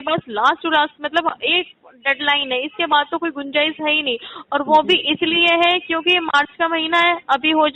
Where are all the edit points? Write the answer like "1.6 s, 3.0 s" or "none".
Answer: none